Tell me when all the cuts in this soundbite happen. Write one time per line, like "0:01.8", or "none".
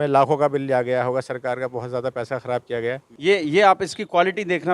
0:03.1